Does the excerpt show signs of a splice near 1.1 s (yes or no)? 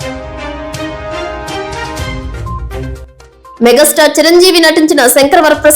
no